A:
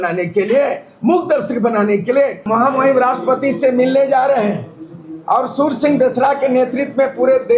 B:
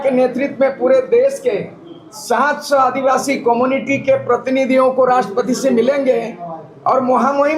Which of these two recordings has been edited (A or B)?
A